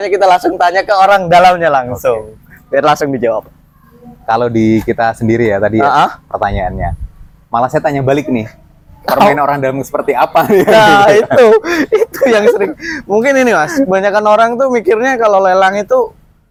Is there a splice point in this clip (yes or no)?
no